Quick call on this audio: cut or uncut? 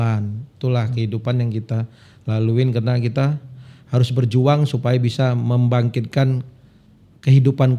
uncut